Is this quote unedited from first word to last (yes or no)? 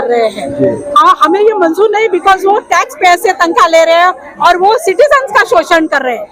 yes